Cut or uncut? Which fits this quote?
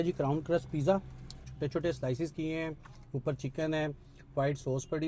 uncut